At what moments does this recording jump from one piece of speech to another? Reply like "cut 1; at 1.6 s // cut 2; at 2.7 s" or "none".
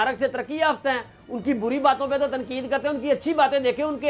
none